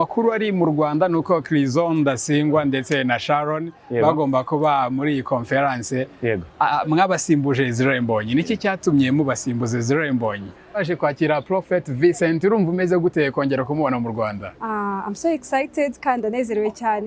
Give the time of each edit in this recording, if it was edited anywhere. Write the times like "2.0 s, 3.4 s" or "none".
10.8 s